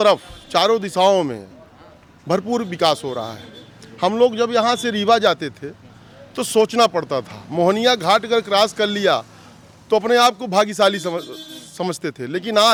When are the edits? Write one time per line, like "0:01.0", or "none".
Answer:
none